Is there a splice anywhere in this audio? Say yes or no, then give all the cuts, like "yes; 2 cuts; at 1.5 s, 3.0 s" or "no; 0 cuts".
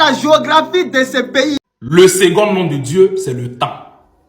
yes; 1 cut; at 1.6 s